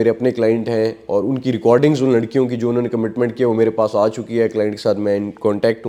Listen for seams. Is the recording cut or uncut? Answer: uncut